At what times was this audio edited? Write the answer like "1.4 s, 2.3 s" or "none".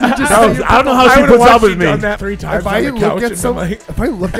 2.2 s

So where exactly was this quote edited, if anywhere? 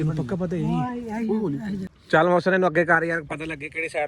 1.9 s

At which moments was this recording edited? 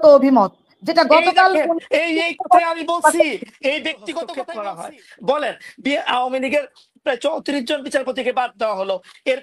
4.4 s

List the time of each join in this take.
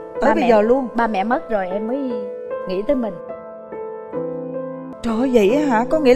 4.9 s

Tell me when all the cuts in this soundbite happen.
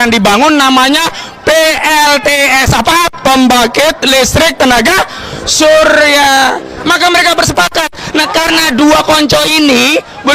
6.8 s

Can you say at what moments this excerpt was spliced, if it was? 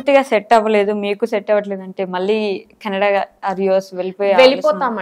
none

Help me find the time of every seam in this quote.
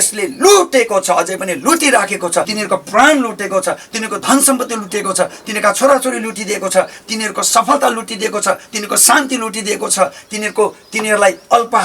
2.5 s

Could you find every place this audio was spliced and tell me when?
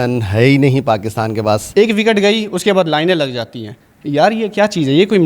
1.6 s

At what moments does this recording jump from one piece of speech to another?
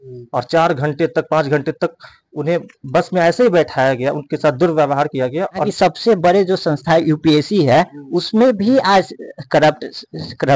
5.7 s

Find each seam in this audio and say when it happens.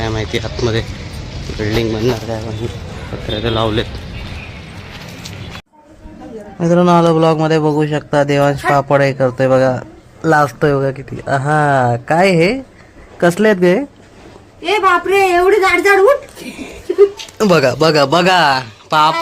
5.7 s

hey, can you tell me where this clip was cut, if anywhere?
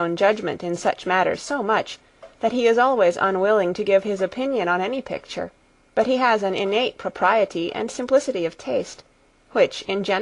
2.4 s

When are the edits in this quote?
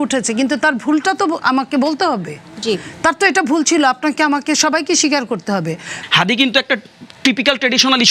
6.0 s

